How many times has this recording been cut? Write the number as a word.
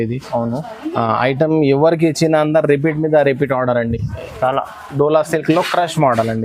zero